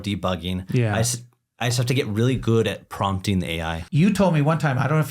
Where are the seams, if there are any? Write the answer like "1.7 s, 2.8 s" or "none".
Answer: 3.8 s